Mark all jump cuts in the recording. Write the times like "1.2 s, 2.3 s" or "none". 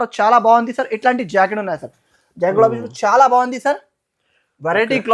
none